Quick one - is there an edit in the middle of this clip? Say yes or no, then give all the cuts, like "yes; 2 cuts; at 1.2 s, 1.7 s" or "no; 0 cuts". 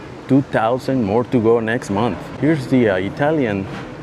yes; 1 cut; at 2.3 s